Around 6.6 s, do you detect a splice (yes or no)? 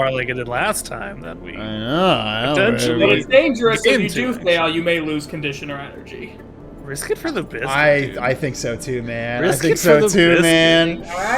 yes